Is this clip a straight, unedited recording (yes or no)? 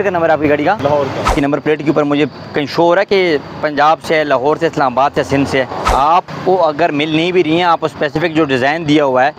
no